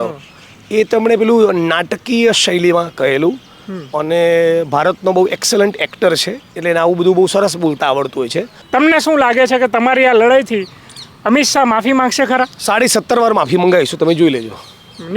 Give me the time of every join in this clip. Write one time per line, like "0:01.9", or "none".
0:08.5